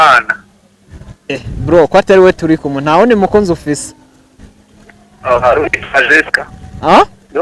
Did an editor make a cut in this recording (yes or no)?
no